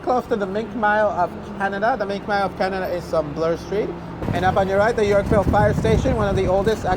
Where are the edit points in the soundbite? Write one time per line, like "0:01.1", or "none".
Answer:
0:04.1